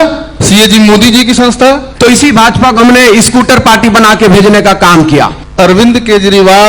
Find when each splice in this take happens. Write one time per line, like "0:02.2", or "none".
0:01.9
0:05.4